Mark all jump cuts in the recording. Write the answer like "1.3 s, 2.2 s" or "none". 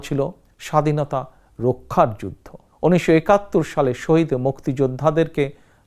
none